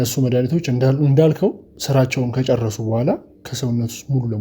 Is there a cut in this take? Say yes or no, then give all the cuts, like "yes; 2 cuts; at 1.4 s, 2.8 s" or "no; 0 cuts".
yes; 2 cuts; at 1.7 s, 3.4 s